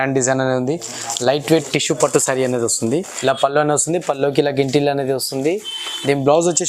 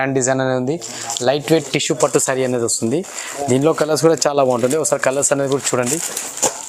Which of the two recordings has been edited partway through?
first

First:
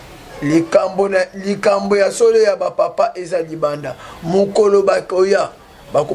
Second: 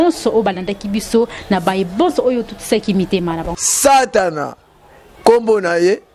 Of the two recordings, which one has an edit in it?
second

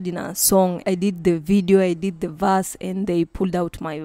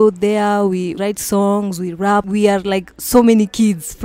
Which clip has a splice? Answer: second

